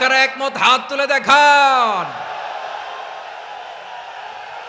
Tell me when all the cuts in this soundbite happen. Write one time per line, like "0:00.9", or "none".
none